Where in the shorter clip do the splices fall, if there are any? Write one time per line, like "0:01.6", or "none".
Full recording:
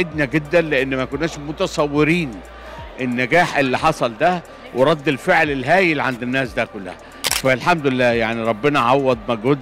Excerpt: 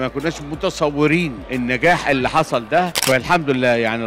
0:01.4
0:03.0